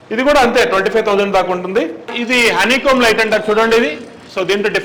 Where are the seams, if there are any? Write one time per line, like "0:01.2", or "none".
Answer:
0:02.1